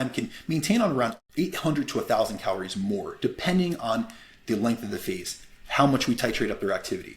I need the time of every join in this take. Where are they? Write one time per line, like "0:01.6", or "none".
0:01.2